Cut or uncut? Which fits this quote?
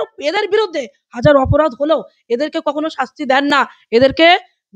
uncut